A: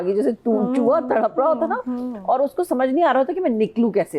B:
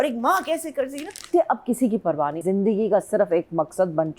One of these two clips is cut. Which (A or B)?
B